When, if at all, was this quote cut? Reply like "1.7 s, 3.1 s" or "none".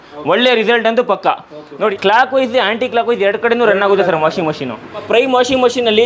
1.9 s, 5.0 s